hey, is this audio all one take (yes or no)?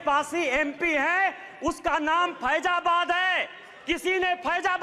yes